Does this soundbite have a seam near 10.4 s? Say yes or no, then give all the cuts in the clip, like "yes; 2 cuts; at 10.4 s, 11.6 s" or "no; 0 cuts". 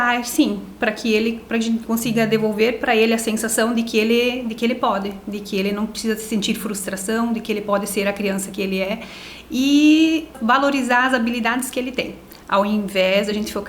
yes; 1 cut; at 10.4 s